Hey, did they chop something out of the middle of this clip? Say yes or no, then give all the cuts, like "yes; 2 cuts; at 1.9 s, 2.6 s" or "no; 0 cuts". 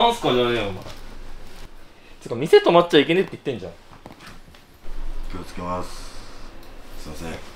yes; 1 cut; at 1.6 s